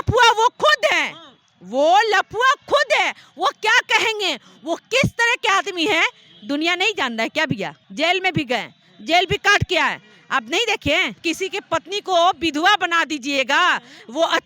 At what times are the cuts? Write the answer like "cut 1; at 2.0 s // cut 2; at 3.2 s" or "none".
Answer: cut 1; at 7.8 s // cut 2; at 11.2 s